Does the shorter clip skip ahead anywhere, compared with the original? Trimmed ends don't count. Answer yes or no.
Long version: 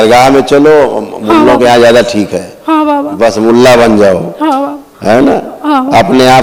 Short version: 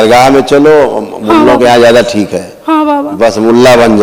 no